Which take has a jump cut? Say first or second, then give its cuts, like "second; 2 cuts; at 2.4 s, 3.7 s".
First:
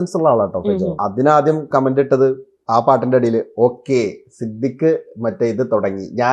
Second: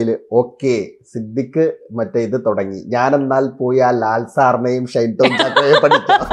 first; 1 cut; at 1.0 s